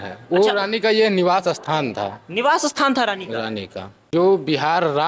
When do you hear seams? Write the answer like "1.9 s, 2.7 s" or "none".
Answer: 4.0 s